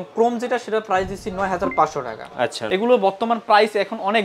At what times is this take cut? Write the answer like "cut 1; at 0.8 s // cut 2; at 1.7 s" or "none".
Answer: cut 1; at 2.6 s